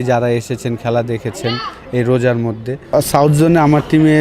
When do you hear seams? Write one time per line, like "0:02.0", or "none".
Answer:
0:02.9

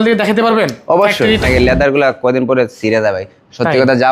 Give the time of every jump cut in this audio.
0:01.4

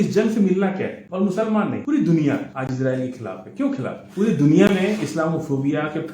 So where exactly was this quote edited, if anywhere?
0:01.0
0:01.8
0:02.5
0:04.0

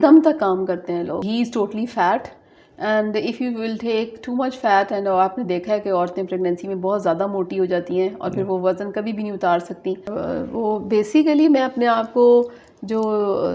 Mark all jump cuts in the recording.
0:01.2
0:10.2

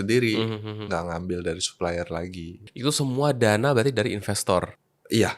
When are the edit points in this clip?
none

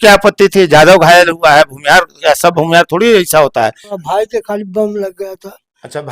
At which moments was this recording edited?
0:04.0

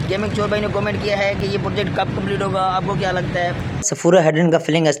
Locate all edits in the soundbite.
0:03.9

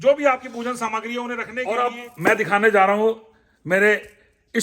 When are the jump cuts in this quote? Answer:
0:01.6

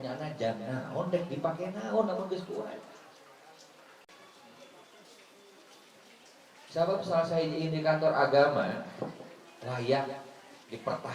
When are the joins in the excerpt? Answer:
0:04.1

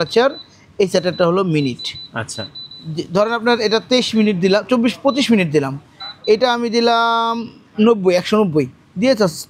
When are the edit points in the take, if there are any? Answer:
none

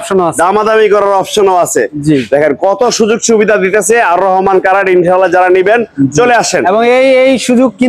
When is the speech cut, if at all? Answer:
none

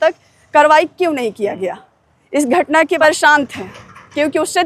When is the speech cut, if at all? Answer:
0:03.0

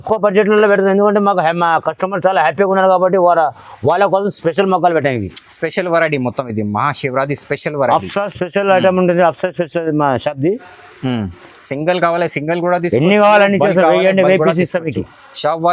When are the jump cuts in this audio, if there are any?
none

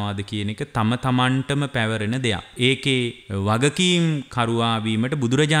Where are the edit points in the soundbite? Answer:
0:02.5
0:03.2

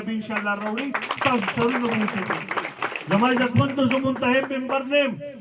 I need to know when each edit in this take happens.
none

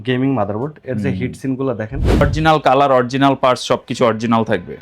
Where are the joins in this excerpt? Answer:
0:02.2

